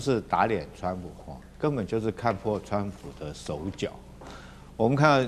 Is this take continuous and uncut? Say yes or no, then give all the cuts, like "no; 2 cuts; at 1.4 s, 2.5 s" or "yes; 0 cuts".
yes; 0 cuts